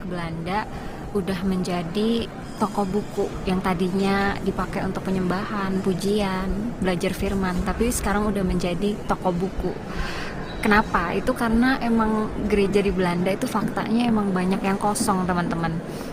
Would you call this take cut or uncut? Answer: uncut